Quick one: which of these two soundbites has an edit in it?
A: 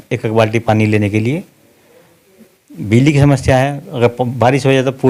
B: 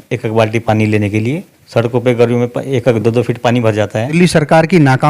B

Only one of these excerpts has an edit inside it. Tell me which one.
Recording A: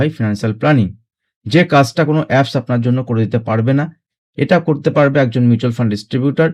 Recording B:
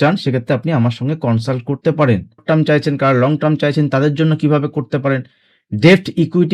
B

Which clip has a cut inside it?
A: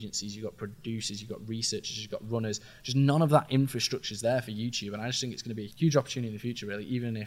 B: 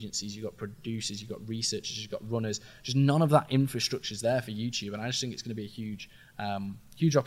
A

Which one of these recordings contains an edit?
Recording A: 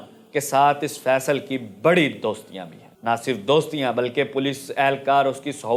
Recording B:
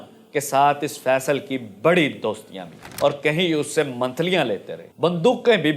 B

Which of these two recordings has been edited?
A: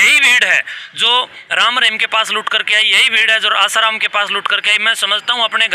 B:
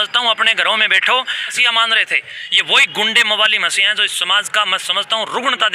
B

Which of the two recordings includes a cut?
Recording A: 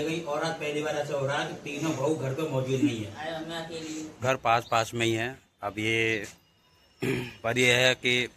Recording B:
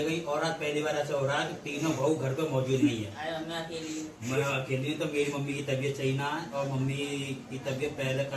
A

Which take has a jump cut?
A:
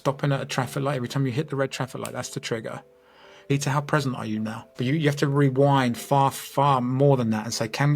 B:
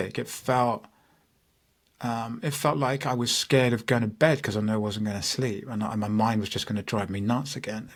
A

